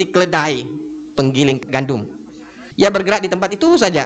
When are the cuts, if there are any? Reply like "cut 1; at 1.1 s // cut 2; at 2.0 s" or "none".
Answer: cut 1; at 2.6 s